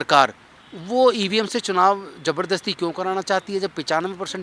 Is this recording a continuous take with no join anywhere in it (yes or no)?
yes